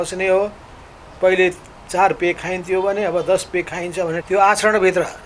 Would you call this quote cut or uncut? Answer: cut